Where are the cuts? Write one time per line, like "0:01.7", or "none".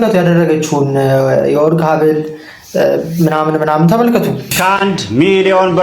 0:04.4